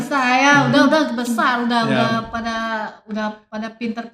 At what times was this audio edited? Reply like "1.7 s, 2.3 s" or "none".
none